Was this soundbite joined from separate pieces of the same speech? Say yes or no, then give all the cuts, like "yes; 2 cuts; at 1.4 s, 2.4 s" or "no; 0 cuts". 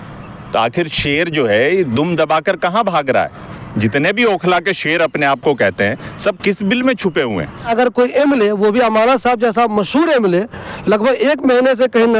yes; 2 cuts; at 3.5 s, 7.7 s